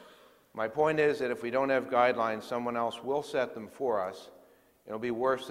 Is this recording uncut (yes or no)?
no